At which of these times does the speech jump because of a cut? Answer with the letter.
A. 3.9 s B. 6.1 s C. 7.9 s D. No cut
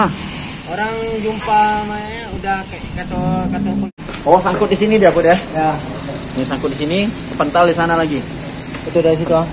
A